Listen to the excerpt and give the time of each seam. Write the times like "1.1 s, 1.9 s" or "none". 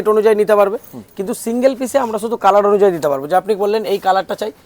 none